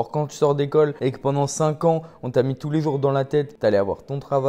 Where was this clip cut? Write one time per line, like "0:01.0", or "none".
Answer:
0:00.9
0:03.5